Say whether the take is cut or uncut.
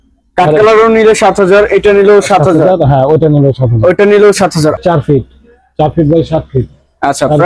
cut